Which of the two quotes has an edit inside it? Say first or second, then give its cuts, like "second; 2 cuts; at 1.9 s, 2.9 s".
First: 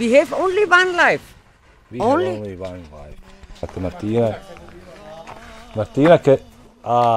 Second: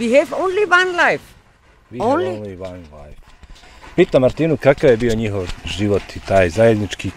first; 1 cut; at 3.6 s